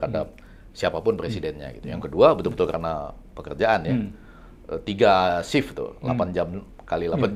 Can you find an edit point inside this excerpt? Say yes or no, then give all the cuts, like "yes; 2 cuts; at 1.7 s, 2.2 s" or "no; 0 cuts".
no; 0 cuts